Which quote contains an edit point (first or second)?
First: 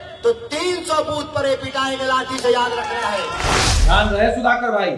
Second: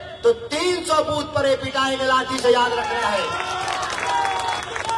first